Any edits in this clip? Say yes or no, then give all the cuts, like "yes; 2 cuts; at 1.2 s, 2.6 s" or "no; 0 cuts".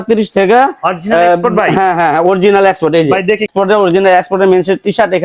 yes; 1 cut; at 3.5 s